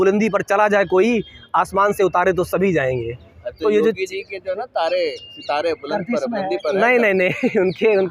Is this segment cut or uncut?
uncut